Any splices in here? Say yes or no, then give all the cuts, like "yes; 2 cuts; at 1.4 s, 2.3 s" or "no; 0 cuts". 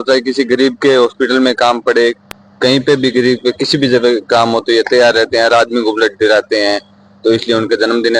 no; 0 cuts